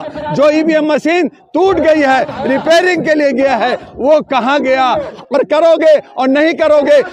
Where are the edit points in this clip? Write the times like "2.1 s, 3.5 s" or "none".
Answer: 5.1 s